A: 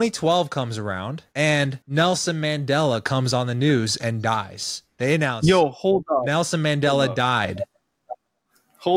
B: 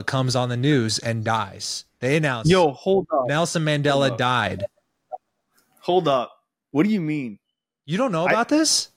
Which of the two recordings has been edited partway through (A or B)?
A